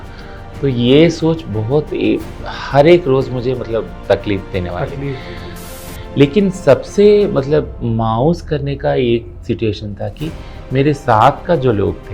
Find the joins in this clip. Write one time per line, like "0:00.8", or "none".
0:05.6